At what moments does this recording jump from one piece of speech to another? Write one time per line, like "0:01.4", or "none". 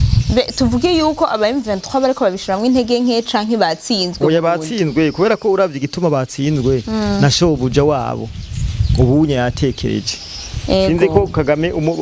none